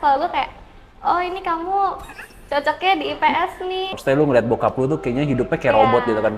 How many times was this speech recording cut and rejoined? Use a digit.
1